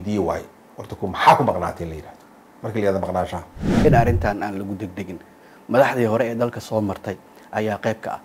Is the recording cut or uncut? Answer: cut